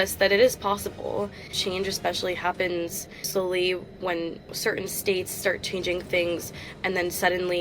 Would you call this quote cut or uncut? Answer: cut